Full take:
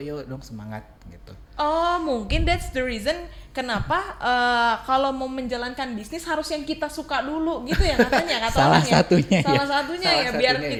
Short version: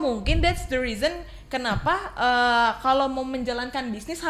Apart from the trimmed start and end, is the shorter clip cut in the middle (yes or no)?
no